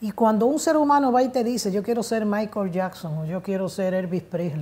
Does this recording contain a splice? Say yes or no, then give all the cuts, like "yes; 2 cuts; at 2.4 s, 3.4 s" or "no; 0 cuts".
no; 0 cuts